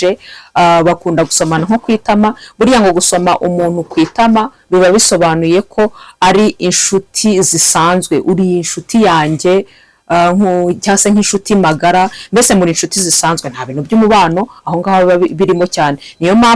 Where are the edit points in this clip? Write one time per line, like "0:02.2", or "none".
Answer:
none